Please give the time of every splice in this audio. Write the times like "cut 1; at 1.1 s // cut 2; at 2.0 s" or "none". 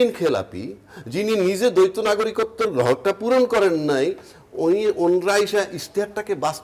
none